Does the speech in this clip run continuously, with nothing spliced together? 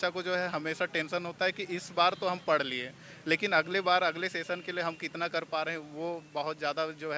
yes; 0 cuts

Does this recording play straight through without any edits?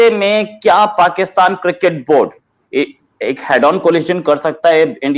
yes; 0 cuts

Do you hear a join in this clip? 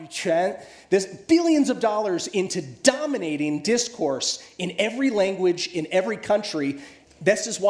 no; 0 cuts

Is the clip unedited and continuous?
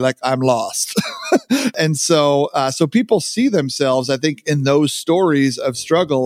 no; 1 cut; at 1.7 s

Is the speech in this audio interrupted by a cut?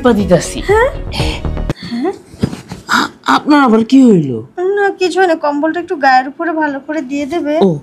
yes; 1 cut; at 1.7 s

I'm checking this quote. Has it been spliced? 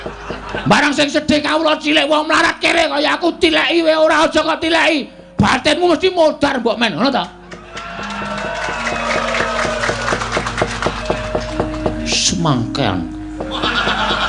no; 0 cuts

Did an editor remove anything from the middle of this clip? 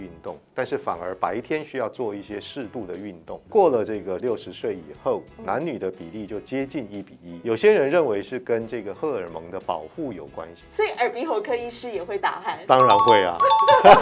yes; 4 cuts; at 3.5 s, 4.2 s, 7.2 s, 10.6 s

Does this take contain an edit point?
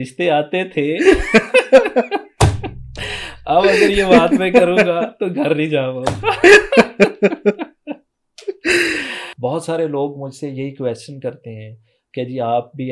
yes; 1 cut; at 9.2 s

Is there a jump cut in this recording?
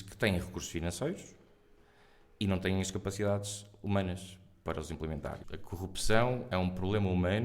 yes; 1 cut; at 5.4 s

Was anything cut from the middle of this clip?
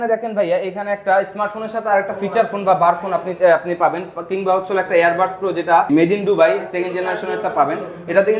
yes; 1 cut; at 5.9 s

